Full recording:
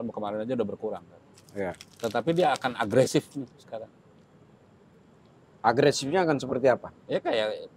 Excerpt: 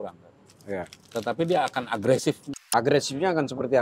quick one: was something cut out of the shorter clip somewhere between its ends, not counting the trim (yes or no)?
yes